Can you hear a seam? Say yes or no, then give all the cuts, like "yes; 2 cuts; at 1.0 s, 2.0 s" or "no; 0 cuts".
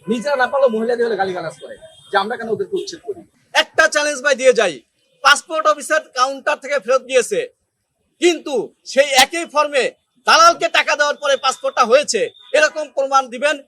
yes; 1 cut; at 3.3 s